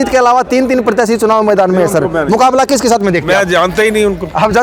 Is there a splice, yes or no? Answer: no